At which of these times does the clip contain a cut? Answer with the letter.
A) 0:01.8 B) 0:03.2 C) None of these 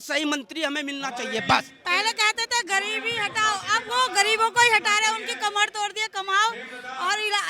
A